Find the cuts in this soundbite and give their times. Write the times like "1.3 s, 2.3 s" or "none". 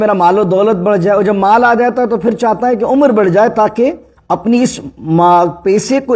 4.1 s